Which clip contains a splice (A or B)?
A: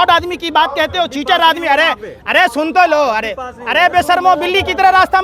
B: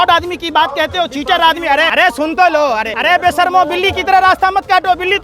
B